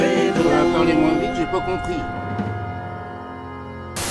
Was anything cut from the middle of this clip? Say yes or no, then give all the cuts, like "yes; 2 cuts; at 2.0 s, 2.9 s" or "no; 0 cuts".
no; 0 cuts